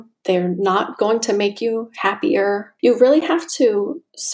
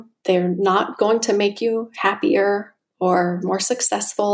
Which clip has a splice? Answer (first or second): first